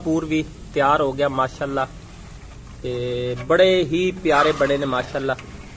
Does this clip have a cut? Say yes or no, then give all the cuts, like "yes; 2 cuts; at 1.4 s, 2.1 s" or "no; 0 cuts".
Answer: no; 0 cuts